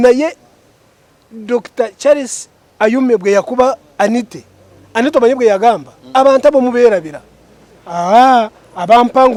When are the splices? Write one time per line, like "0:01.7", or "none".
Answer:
none